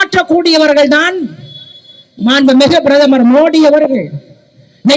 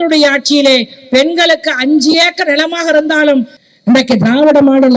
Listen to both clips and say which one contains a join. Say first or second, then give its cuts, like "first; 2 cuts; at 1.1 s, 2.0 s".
second; 1 cut; at 3.6 s